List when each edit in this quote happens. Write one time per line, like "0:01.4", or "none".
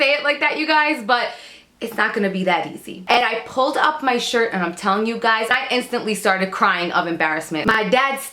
0:03.2
0:05.5
0:07.7